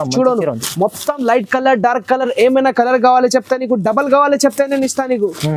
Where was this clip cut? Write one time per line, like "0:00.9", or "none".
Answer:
none